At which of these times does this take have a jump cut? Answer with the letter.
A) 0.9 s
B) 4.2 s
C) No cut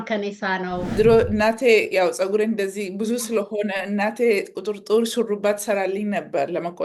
A